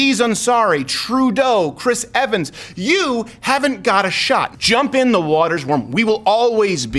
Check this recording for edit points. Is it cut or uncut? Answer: cut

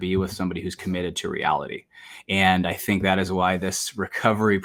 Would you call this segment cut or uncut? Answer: uncut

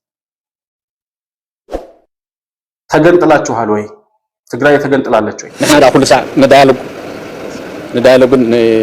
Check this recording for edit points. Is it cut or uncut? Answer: cut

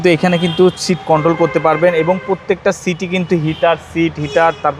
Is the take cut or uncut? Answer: uncut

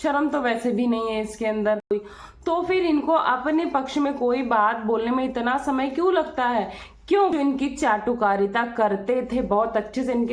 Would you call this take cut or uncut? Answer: cut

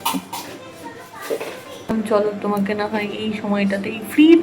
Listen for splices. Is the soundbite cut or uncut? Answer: cut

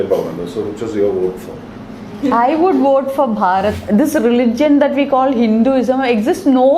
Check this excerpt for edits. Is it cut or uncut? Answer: cut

